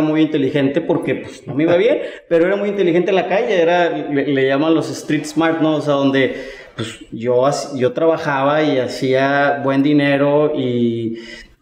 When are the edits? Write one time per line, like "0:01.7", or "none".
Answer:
none